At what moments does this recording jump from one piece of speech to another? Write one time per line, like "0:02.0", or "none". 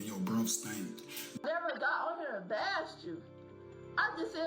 0:01.4

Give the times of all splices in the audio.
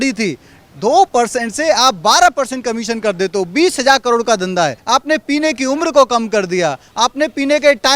0:04.8

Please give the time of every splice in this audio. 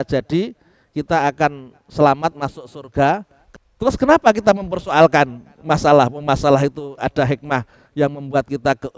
0:03.4

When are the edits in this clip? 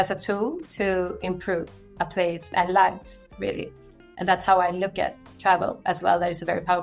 0:02.5

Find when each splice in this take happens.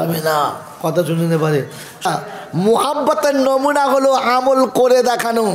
0:02.1

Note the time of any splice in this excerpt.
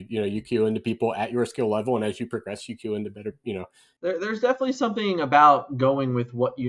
0:03.8

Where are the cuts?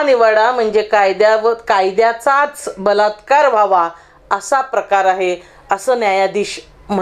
none

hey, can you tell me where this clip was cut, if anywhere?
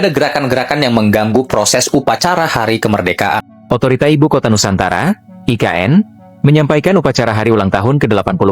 0:03.4

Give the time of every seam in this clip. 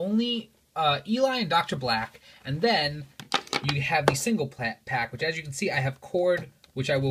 none

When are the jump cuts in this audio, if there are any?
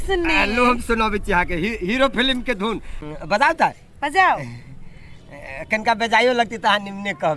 0:03.1

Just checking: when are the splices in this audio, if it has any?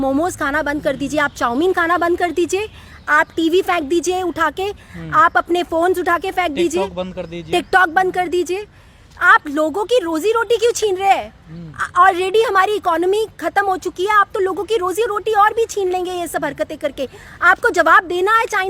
none

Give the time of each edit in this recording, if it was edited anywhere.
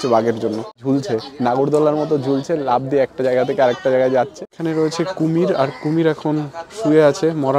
0:00.8
0:04.4

